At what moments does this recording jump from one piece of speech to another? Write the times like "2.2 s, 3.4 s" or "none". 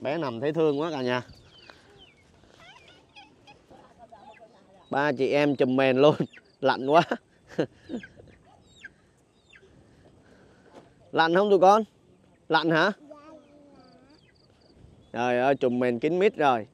3.7 s, 14.8 s